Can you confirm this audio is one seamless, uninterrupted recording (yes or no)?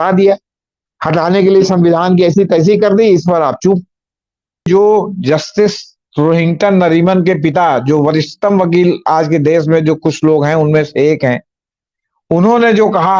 no